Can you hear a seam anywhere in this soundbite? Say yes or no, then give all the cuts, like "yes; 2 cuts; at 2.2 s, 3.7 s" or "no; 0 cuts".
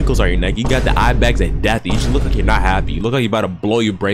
no; 0 cuts